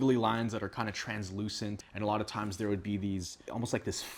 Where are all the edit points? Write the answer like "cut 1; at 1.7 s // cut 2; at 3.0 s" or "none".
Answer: none

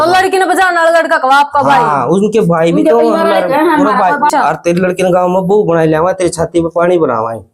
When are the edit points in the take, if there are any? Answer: cut 1; at 4.3 s

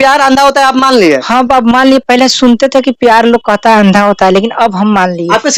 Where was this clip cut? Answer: none

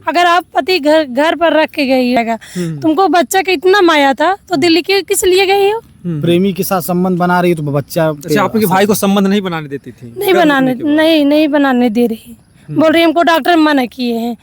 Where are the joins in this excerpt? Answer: cut 1; at 2.2 s

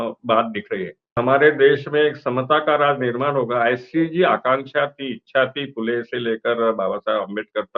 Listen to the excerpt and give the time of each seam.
cut 1; at 1.2 s

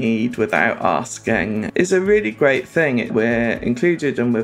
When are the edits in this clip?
cut 1; at 1.7 s // cut 2; at 3.1 s

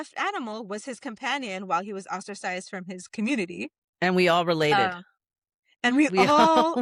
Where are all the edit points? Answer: none

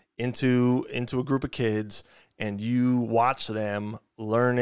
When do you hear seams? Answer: none

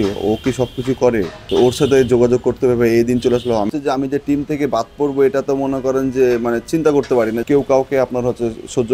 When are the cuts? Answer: cut 1; at 1.4 s // cut 2; at 3.7 s // cut 3; at 7.4 s

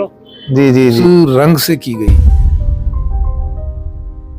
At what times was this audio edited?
cut 1; at 1.0 s

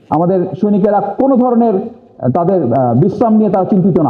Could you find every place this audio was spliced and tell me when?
none

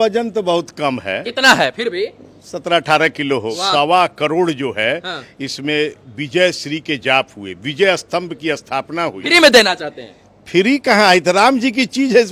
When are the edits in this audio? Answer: cut 1; at 3.5 s // cut 2; at 9.2 s

